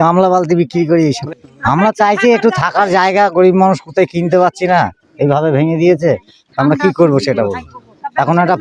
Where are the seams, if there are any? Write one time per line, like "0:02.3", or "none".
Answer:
0:01.2